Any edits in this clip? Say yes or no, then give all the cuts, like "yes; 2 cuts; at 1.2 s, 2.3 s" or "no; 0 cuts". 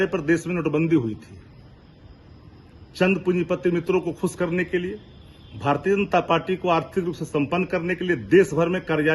no; 0 cuts